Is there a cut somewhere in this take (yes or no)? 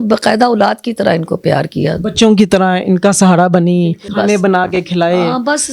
yes